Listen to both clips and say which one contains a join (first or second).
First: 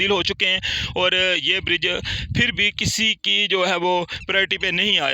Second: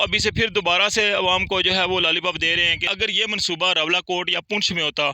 second